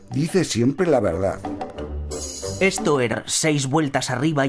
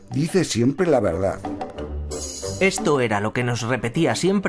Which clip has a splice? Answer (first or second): second